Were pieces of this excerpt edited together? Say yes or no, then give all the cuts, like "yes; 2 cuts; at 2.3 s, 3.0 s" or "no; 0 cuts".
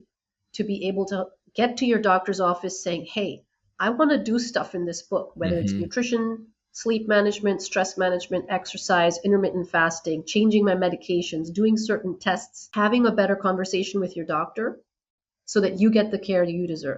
yes; 1 cut; at 12.6 s